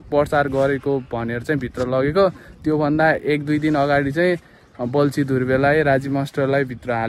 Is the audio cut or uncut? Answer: uncut